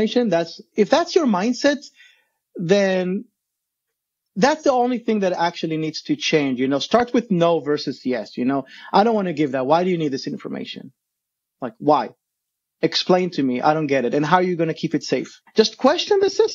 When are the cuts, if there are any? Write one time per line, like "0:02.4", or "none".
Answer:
0:15.4